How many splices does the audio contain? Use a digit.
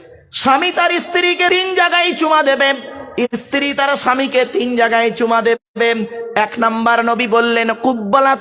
1